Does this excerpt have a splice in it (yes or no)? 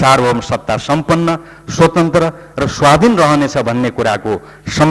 no